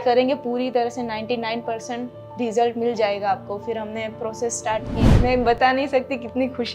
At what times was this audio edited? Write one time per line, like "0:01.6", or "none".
0:05.0